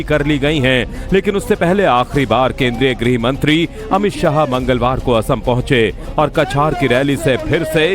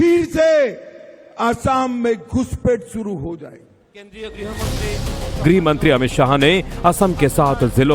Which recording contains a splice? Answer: first; 1 cut; at 6.3 s

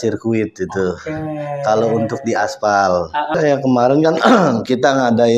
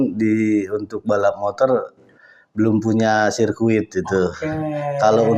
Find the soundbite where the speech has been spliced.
first; 1 cut; at 3.4 s

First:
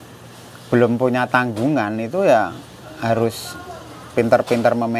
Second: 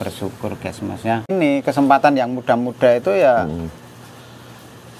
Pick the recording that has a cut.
second; 1 cut; at 1.3 s

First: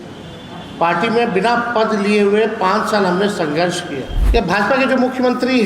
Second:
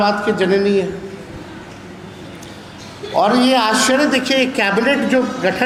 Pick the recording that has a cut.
first; 1 cut; at 4.1 s

